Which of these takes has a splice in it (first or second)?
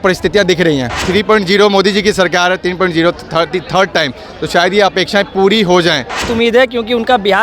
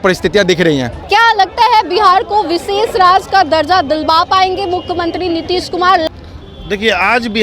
first